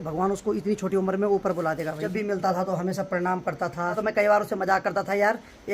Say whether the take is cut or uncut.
cut